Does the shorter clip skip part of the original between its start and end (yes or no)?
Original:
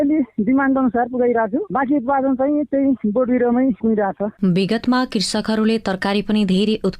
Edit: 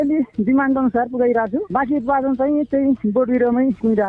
no